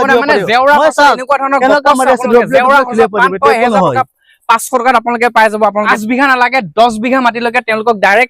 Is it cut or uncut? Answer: cut